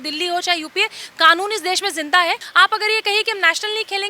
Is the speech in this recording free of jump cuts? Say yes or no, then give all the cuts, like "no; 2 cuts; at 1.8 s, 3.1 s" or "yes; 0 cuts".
no; 1 cut; at 2.5 s